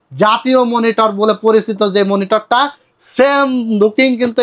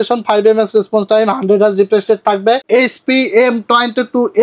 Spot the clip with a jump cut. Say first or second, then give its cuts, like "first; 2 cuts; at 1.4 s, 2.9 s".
second; 1 cut; at 2.6 s